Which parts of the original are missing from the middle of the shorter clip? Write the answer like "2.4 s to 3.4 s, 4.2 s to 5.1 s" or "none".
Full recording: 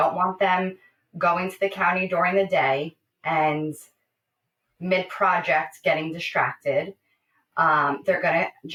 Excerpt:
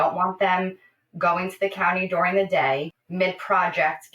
3.0 s to 4.7 s